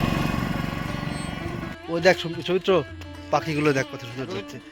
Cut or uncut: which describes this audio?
cut